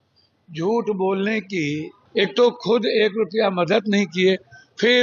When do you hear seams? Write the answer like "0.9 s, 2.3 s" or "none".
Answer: 1.9 s